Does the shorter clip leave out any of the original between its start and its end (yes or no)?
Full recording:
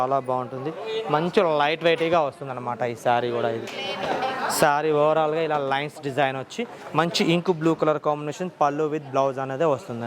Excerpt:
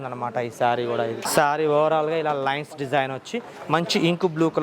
yes